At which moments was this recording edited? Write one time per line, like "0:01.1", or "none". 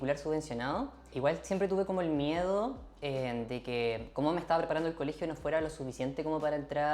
0:01.1